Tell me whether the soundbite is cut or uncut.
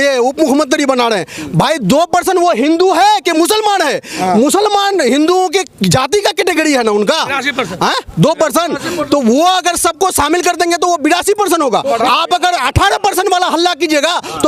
uncut